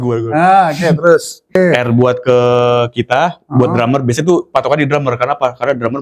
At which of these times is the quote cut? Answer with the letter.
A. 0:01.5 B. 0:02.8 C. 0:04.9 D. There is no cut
A